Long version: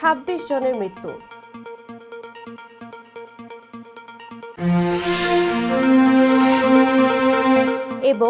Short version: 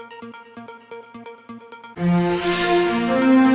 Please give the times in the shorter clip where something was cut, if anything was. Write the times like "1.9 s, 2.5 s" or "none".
1.9 s